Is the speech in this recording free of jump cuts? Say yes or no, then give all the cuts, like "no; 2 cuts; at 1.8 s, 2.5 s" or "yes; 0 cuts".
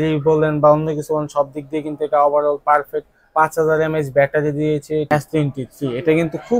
no; 1 cut; at 5.1 s